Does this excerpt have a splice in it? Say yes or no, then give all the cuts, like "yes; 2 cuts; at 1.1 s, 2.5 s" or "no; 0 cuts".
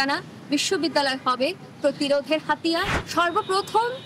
yes; 1 cut; at 3.0 s